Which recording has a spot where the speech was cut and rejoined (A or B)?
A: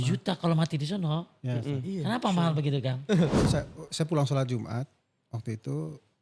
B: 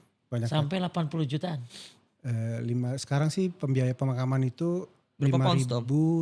A